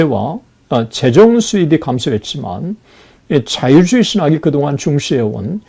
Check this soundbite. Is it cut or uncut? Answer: uncut